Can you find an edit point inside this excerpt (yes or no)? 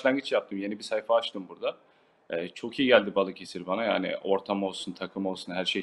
no